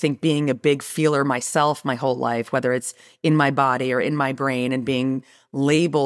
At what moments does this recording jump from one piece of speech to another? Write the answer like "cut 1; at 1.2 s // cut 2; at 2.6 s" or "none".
none